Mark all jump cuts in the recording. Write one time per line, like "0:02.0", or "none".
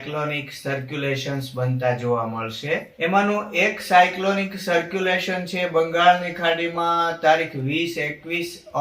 0:02.9